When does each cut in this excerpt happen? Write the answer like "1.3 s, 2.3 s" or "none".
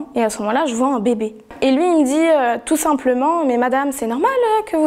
1.4 s